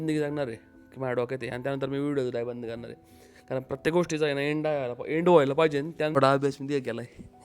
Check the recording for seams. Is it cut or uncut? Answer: cut